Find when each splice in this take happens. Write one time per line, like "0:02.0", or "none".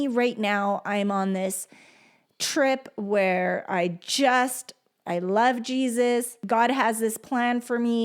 0:06.4